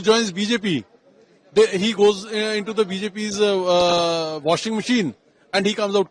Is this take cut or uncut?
uncut